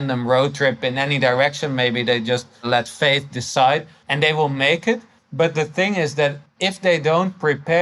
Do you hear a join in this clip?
yes; 4 cuts; at 2.7 s, 4.0 s, 5.2 s, 6.5 s

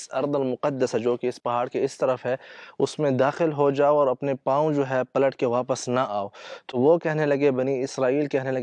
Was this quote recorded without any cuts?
yes; 0 cuts

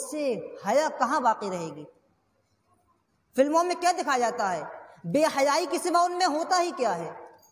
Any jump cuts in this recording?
no; 0 cuts

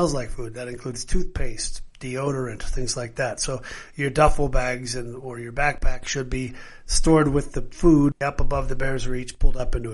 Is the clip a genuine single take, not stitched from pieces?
no; 1 cut; at 8.2 s

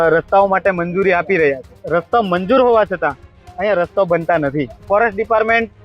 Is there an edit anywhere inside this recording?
yes; 2 cuts; at 1.7 s, 4.8 s

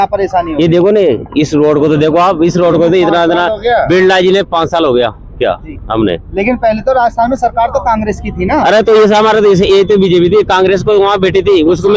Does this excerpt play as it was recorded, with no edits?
yes; 0 cuts

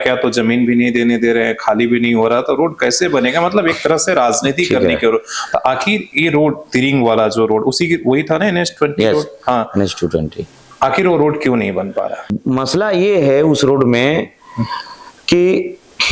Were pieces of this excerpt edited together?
yes; 2 cuts; at 10.6 s, 12.3 s

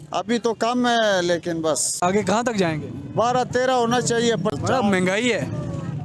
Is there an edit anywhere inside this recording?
yes; 2 cuts; at 1.9 s, 4.5 s

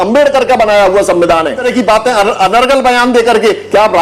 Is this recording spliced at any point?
yes; 1 cut; at 1.6 s

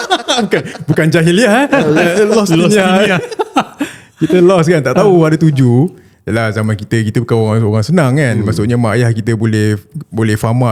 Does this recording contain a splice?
no; 0 cuts

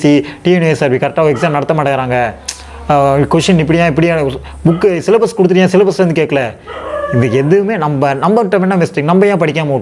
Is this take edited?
no; 0 cuts

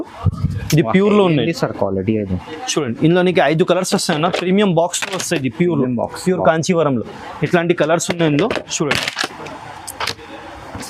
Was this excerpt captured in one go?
yes; 0 cuts

